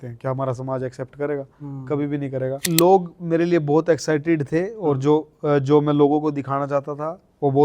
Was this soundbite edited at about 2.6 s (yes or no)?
yes